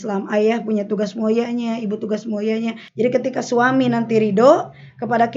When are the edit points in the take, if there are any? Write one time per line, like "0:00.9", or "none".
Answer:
0:02.8

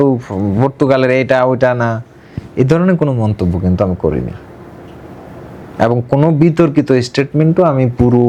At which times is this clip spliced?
none

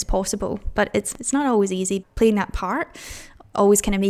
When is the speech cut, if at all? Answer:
0:01.1
0:02.1

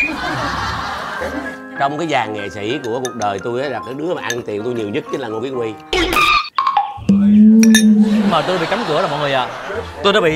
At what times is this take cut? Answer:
0:01.3

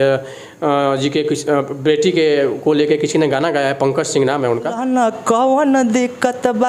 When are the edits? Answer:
0:04.8

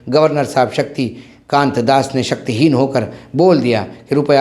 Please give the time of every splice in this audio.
none

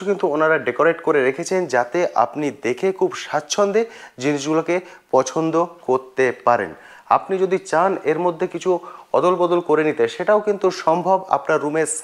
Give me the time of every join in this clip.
none

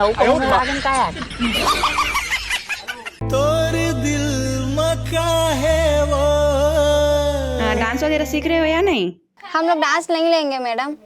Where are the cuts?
0:02.8

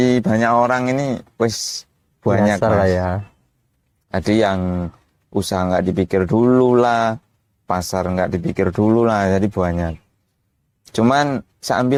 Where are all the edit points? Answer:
none

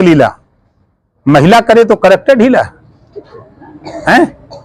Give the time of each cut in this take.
none

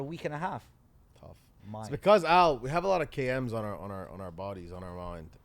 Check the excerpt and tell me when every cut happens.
0:01.5

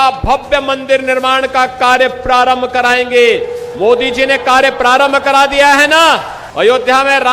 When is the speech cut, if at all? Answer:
0:06.4

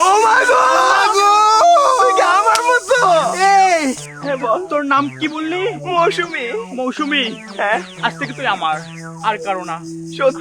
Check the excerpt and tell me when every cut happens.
none

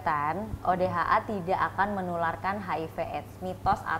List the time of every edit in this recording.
none

